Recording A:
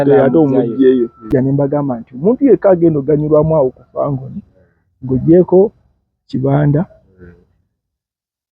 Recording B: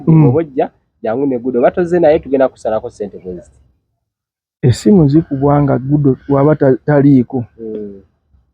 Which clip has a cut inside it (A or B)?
A